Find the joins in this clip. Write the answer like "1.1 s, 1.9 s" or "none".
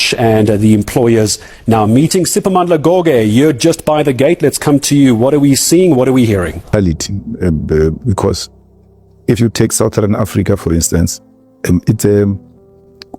6.7 s